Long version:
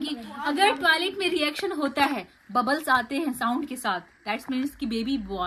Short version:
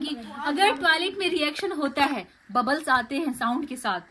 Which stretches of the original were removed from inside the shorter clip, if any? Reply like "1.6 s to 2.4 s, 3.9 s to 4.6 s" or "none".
none